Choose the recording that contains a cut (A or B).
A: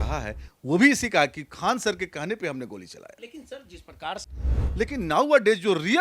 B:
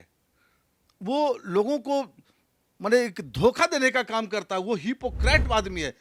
A